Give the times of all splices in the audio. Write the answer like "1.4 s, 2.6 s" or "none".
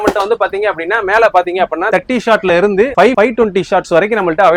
none